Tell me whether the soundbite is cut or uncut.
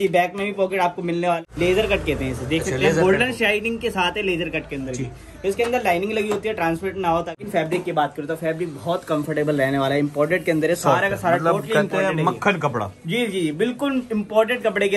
cut